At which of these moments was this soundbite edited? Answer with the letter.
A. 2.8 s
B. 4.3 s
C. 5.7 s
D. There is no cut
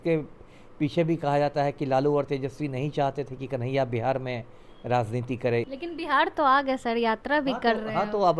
C